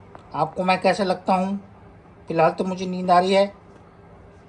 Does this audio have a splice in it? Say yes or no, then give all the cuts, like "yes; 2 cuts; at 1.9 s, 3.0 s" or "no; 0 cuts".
no; 0 cuts